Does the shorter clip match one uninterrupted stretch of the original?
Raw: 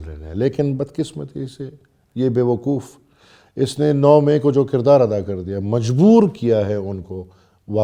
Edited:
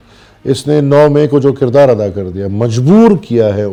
yes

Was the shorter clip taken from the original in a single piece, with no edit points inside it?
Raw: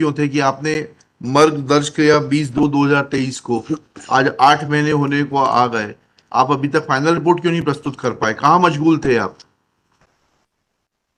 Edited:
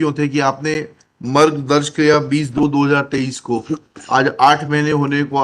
yes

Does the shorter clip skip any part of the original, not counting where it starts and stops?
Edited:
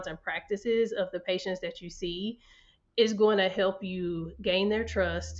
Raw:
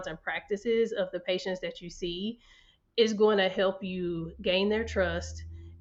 no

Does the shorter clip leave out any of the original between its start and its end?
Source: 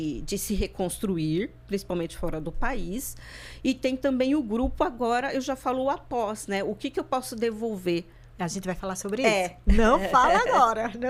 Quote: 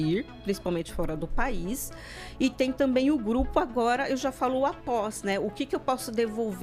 no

